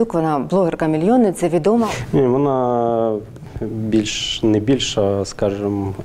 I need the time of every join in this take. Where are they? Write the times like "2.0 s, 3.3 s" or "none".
1.9 s